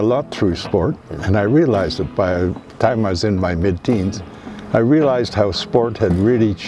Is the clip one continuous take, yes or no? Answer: yes